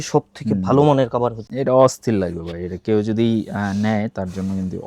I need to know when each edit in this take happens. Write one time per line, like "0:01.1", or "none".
none